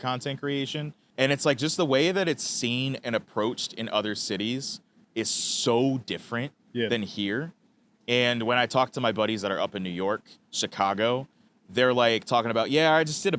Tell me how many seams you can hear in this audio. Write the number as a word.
one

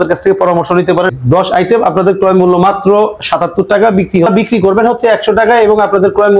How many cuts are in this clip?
two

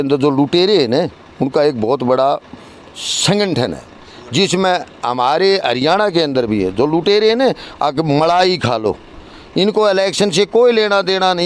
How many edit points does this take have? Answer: zero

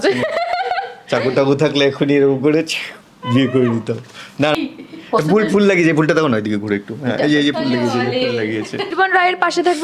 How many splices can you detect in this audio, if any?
two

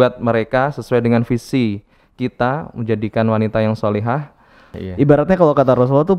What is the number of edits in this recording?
one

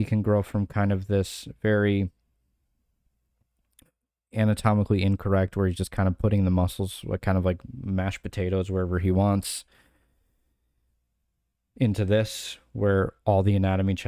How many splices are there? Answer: zero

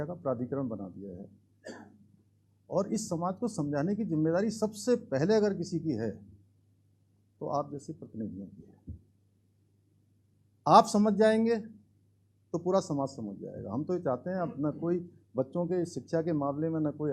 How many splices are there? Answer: zero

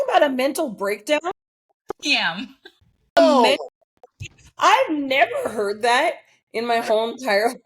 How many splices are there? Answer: one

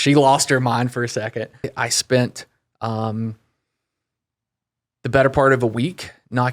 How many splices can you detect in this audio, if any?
one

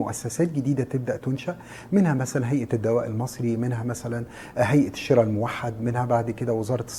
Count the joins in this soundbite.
zero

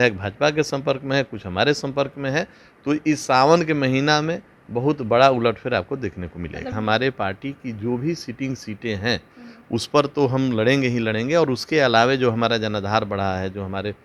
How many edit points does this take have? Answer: one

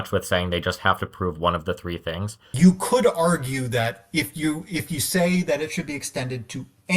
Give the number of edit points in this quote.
one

